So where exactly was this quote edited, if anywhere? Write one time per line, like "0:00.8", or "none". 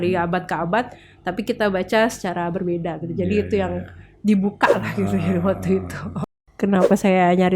0:06.5

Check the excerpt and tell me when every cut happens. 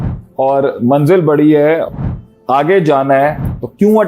0:01.9

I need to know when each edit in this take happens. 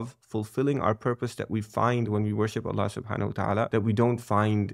0:03.7

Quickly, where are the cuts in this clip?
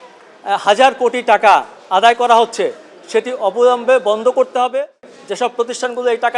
0:05.1

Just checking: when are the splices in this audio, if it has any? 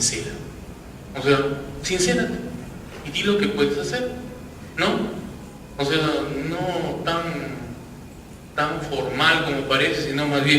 0:09.1

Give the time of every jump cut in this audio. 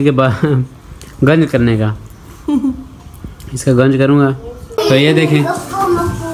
0:04.6

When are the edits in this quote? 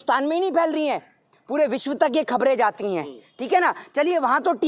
none

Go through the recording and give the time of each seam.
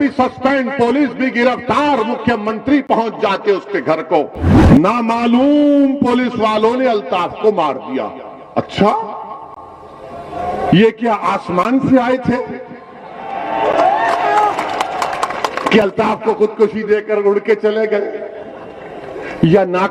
0:04.6

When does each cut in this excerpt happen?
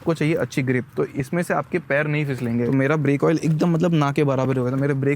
0:02.7

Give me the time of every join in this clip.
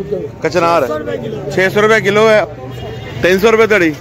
0:02.4

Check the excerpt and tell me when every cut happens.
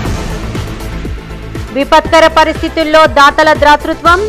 none

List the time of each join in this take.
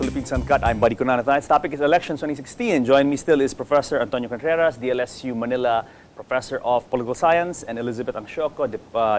0:03.6

